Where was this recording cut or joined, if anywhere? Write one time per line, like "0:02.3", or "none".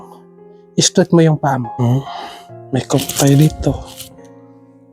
0:01.7